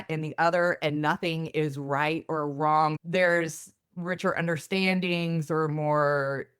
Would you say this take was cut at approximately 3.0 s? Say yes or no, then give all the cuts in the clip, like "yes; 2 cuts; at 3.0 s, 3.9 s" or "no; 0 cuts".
yes; 1 cut; at 3.0 s